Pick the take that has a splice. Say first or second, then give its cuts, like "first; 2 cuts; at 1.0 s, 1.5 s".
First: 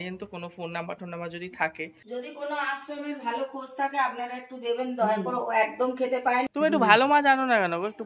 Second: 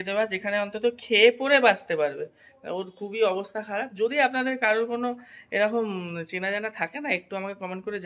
first; 2 cuts; at 1.9 s, 6.4 s